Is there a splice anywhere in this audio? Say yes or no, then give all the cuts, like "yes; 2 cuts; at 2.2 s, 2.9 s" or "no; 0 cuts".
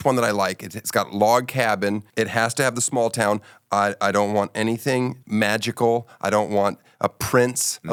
no; 0 cuts